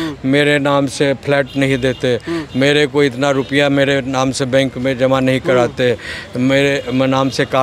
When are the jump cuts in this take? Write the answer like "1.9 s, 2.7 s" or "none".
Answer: none